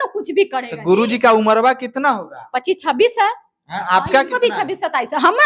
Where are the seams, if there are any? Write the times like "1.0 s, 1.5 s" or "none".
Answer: none